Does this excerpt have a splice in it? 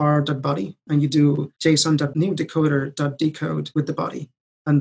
yes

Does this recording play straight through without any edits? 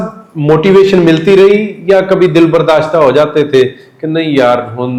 yes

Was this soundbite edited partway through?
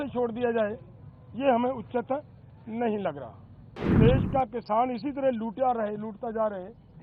yes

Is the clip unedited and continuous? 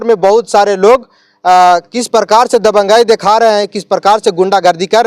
yes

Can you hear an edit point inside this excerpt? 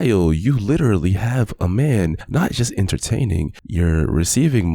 no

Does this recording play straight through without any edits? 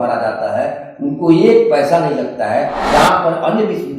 no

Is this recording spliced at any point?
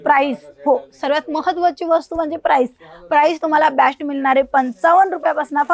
no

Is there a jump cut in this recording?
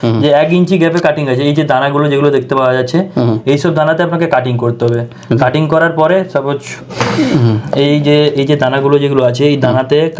no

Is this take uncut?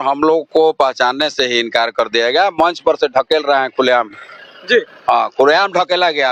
yes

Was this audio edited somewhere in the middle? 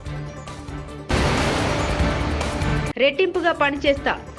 yes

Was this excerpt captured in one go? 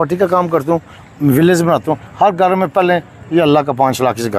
yes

